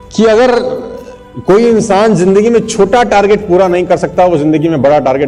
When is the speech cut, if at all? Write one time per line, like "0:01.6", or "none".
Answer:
none